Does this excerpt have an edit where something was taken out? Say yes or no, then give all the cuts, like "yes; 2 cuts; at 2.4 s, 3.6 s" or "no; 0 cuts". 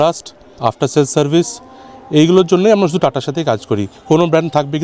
no; 0 cuts